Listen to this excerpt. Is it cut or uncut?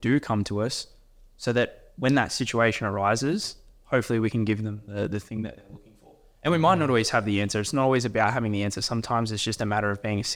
uncut